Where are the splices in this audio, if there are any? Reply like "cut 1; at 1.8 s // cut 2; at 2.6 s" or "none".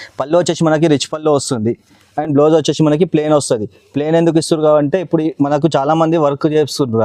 none

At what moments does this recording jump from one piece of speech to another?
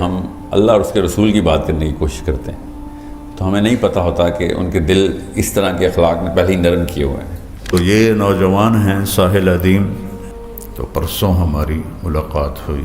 cut 1; at 7.7 s

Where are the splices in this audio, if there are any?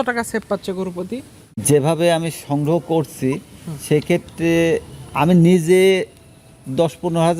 cut 1; at 1.6 s

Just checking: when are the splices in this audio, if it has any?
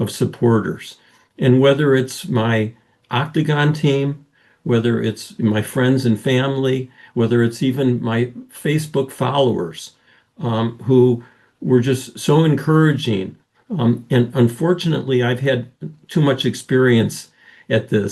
none

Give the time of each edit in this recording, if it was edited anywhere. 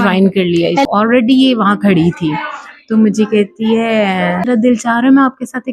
cut 1; at 0.9 s // cut 2; at 4.5 s

